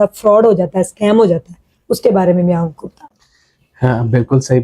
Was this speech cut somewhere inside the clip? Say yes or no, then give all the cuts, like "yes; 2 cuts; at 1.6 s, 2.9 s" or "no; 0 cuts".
no; 0 cuts